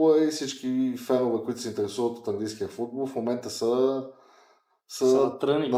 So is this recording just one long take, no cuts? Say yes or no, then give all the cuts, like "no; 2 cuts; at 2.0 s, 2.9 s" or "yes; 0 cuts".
yes; 0 cuts